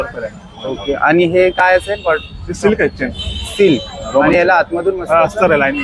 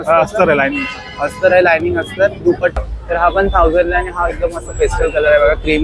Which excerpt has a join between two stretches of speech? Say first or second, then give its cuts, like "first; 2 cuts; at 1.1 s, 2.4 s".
second; 1 cut; at 2.8 s